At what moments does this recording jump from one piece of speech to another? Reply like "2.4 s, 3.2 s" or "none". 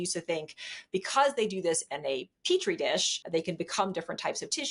3.2 s